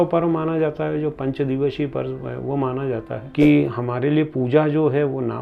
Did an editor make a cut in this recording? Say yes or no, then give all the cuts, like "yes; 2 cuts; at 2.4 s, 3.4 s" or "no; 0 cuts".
yes; 1 cut; at 3.2 s